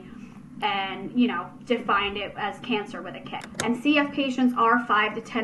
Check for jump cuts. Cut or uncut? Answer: cut